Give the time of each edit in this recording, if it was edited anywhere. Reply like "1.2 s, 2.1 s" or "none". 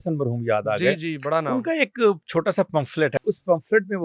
3.2 s